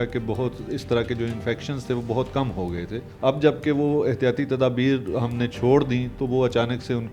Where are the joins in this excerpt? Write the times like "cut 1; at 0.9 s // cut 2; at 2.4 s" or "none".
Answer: cut 1; at 3.0 s